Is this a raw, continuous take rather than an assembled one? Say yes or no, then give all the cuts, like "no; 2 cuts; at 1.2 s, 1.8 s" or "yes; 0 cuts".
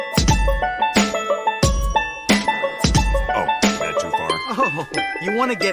yes; 0 cuts